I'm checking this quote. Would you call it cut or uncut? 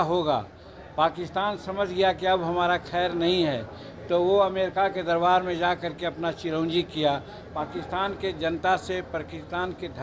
cut